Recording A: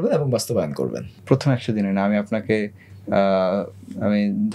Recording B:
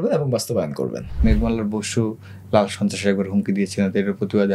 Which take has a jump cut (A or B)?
B